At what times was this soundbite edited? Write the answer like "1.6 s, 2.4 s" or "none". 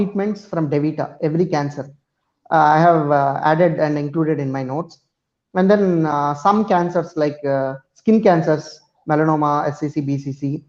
none

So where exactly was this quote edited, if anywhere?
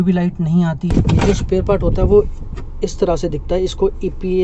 0.9 s

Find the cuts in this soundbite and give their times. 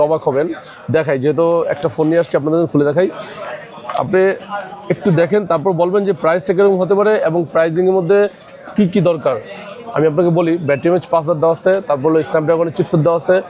none

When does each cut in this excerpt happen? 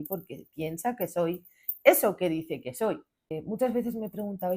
3.6 s

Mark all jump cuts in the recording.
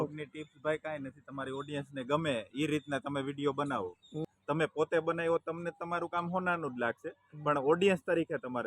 4.3 s

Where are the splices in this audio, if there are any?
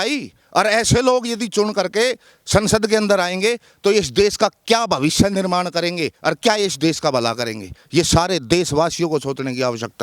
none

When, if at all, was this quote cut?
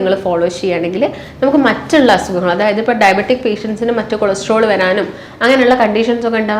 none

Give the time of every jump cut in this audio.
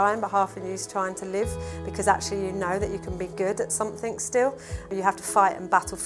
4.9 s

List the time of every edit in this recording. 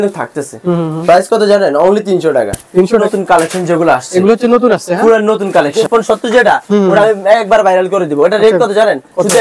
3.0 s, 5.8 s

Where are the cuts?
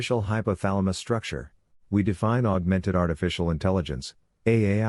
none

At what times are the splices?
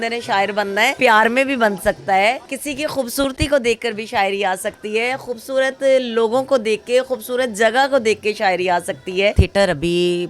0.9 s, 2.5 s, 9.4 s

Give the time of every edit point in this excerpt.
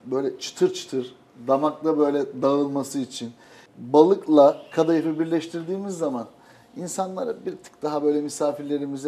none

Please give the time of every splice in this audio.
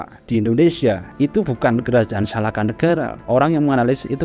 1.1 s, 3.2 s

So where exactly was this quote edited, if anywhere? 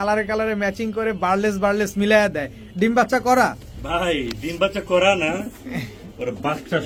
none

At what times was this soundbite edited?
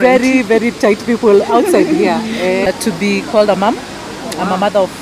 2.7 s

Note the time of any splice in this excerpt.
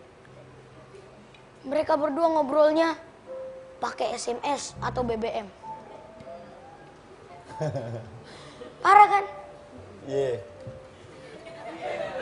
4.9 s

